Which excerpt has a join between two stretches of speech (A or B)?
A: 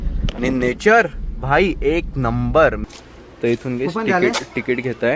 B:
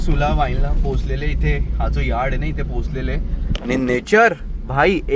A